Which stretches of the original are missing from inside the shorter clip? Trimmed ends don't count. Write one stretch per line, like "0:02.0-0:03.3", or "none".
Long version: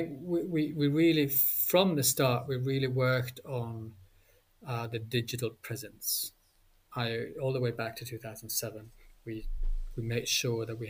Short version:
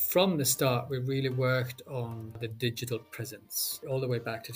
0:04.0-0:04.9
0:06.3-0:07.3